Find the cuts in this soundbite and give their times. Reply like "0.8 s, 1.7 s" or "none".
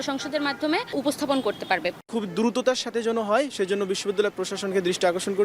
0.9 s, 2.0 s